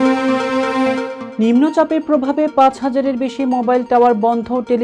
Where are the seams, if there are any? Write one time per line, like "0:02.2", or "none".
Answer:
none